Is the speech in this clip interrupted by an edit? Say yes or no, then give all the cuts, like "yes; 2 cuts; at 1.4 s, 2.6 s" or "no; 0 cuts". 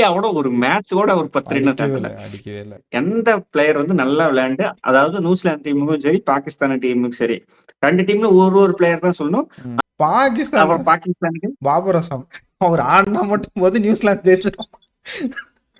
yes; 2 cuts; at 2.8 s, 9.6 s